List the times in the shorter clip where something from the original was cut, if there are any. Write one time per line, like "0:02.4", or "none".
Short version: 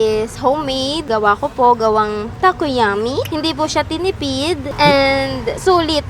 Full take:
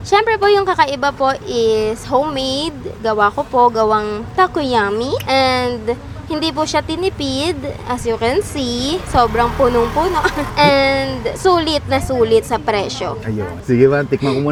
0:01.0
0:03.3
0:04.7